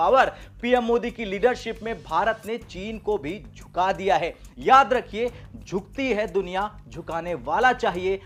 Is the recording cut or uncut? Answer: uncut